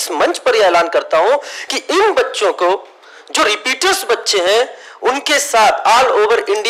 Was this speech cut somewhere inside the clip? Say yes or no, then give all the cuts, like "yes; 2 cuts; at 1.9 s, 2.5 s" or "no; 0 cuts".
no; 0 cuts